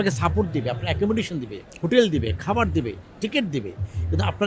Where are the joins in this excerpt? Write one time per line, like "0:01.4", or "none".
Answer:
none